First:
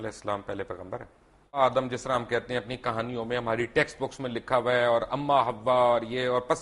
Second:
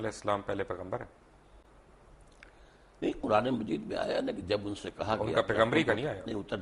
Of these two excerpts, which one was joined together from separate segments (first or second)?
first